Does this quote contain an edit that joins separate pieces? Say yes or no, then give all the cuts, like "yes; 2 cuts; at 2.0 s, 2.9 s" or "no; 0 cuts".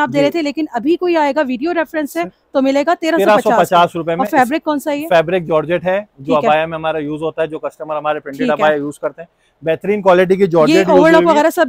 no; 0 cuts